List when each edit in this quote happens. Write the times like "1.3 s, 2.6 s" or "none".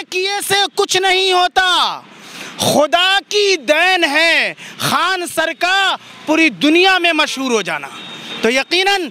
none

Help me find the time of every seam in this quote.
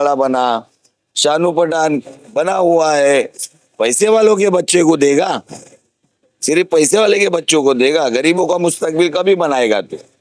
none

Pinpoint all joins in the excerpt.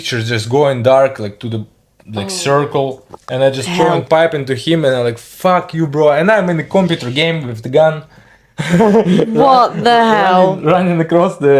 none

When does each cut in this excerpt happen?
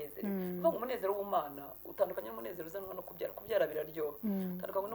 none

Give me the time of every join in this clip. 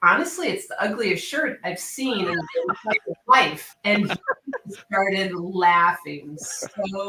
none

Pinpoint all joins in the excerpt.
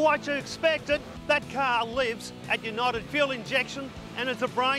1.1 s

